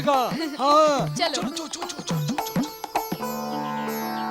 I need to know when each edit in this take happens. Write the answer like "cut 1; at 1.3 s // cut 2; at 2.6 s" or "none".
none